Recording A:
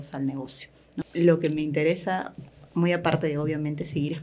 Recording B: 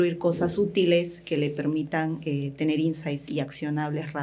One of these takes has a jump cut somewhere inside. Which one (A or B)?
A